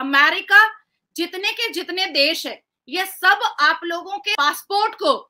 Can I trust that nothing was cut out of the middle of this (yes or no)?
no